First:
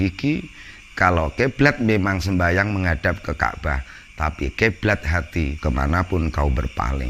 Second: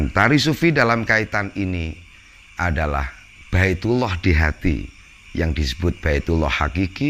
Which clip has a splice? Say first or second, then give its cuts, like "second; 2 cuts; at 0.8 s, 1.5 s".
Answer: first; 1 cut; at 5.6 s